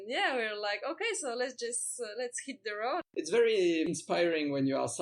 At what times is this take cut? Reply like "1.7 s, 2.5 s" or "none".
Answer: 3.1 s